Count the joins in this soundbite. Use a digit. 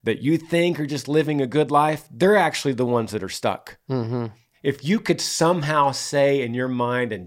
1